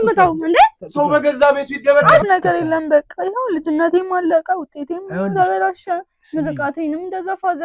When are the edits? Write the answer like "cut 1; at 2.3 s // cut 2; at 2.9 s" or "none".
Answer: cut 1; at 2.2 s